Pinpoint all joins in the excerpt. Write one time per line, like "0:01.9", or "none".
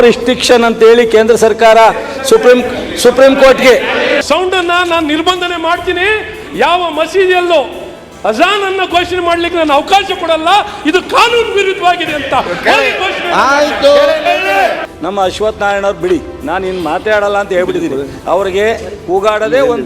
0:04.2
0:14.9